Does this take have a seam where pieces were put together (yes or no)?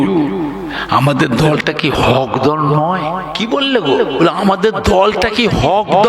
yes